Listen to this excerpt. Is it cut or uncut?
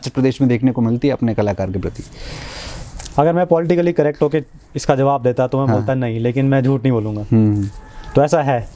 uncut